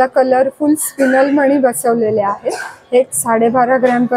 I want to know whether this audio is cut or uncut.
uncut